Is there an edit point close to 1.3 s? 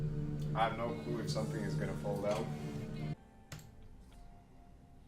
no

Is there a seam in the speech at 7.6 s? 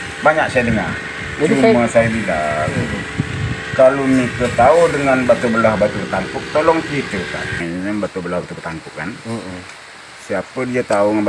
yes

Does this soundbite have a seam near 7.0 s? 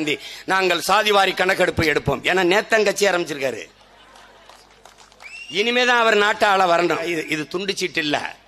yes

